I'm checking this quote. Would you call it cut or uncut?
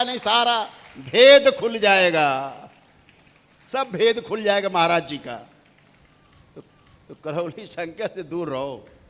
uncut